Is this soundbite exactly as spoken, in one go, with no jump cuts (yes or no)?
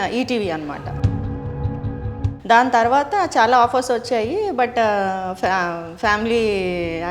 yes